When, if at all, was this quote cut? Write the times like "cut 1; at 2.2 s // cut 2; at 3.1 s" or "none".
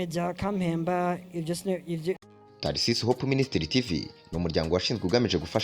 cut 1; at 2.2 s